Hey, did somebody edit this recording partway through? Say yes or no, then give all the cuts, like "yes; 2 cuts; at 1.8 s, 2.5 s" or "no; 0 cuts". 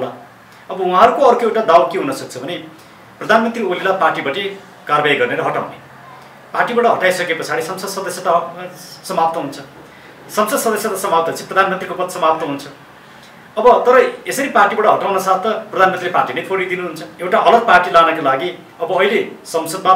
yes; 1 cut; at 17.1 s